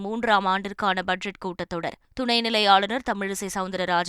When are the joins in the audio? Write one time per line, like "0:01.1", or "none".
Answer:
0:02.0